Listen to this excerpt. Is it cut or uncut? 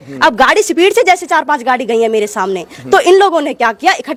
uncut